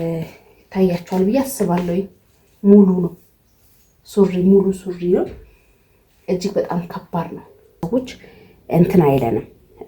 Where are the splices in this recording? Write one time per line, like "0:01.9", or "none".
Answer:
0:07.8